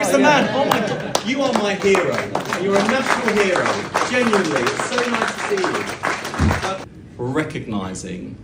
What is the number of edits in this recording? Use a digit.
1